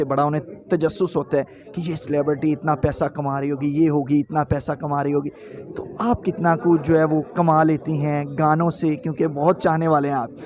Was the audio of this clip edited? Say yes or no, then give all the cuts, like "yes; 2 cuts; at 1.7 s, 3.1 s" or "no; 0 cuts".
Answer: no; 0 cuts